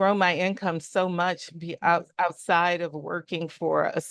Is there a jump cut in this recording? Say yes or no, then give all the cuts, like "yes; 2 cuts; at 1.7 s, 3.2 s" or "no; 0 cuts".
no; 0 cuts